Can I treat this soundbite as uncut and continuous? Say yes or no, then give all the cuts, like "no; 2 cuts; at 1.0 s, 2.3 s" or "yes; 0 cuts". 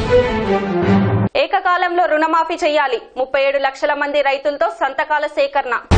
no; 1 cut; at 1.2 s